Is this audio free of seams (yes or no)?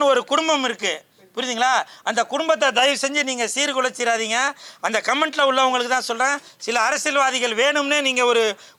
yes